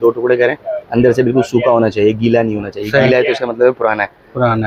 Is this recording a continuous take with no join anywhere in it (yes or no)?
yes